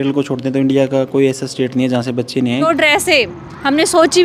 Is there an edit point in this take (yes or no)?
yes